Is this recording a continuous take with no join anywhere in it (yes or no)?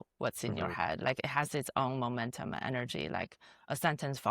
yes